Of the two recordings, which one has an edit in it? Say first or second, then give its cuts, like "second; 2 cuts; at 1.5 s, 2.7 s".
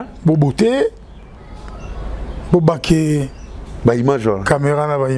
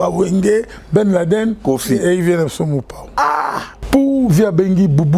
second; 1 cut; at 3.7 s